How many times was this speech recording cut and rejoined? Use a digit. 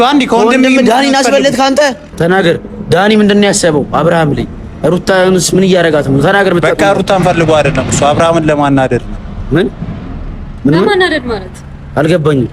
1